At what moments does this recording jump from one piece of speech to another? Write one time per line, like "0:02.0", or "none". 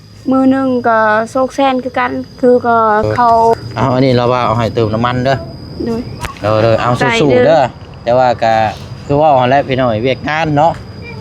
0:03.5